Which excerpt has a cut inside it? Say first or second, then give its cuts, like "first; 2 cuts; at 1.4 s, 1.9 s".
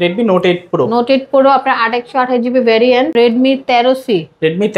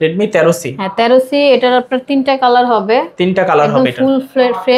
first; 1 cut; at 3.1 s